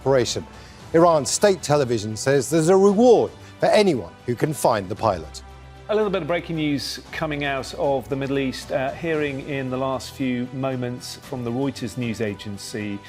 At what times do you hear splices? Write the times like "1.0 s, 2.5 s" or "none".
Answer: 5.6 s